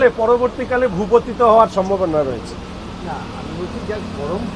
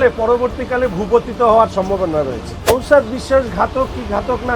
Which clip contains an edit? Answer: second; 1 cut; at 2.7 s

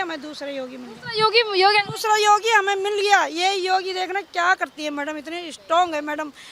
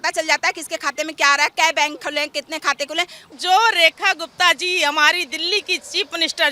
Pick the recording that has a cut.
second; 1 cut; at 3.3 s

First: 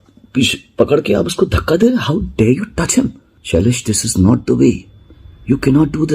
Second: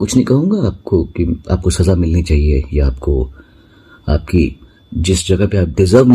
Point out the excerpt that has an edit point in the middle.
first; 1 cut; at 3.3 s

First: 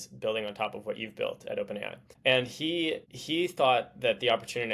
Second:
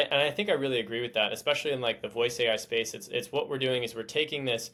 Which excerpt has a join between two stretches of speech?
first; 2 cuts; at 2.0 s, 3.1 s

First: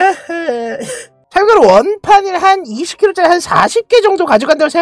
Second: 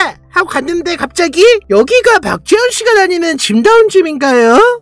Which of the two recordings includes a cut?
first; 1 cut; at 1.1 s

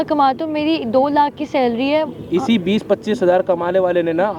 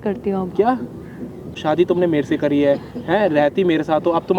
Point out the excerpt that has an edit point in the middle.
second; 1 cut; at 1.6 s

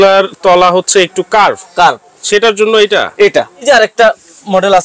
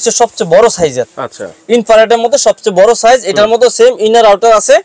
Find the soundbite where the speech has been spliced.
first; 1 cut; at 3.6 s

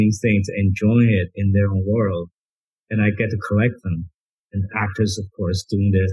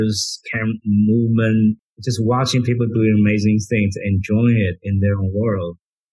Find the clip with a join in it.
second; 1 cut; at 1.8 s

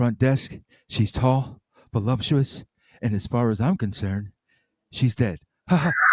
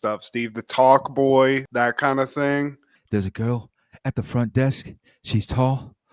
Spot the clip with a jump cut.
second; 1 cut; at 2.8 s

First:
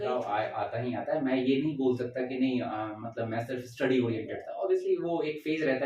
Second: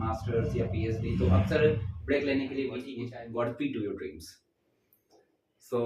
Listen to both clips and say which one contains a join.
second; 1 cut; at 2.9 s

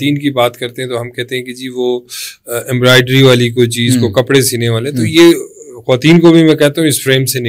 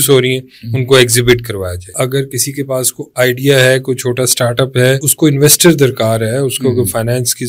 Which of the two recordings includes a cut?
second; 2 cuts; at 2.0 s, 5.1 s

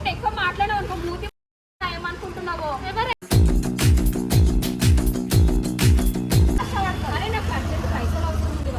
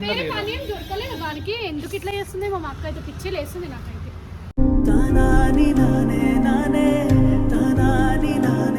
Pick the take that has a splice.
first; 1 cut; at 6.6 s

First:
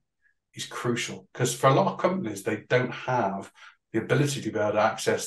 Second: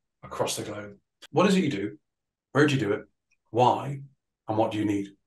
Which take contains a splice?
second; 1 cut; at 1.2 s

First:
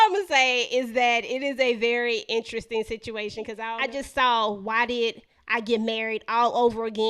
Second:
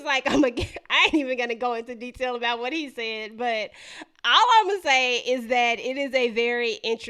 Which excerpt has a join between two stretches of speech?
first; 1 cut; at 3.6 s

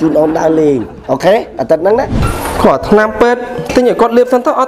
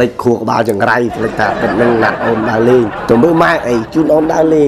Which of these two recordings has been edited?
first; 1 cut; at 2.2 s

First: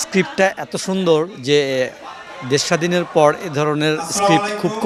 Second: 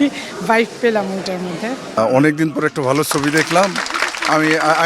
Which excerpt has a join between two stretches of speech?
second; 1 cut; at 2.0 s

